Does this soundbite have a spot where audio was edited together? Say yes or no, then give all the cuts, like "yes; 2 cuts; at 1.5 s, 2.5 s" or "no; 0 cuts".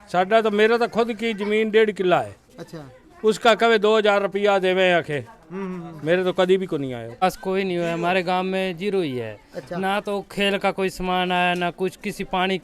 yes; 1 cut; at 7.2 s